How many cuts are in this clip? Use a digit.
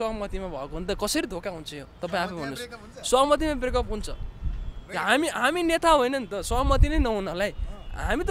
0